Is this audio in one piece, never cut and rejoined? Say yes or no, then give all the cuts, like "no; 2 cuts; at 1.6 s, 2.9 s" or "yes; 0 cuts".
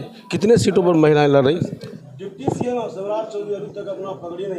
no; 1 cut; at 2.0 s